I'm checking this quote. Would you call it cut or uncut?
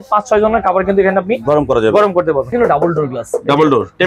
cut